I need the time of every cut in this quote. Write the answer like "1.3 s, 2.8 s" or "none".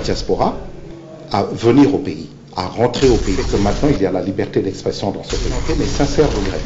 3.5 s, 5.7 s